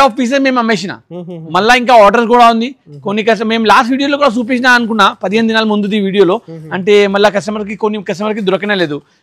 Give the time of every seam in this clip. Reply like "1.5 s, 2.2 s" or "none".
none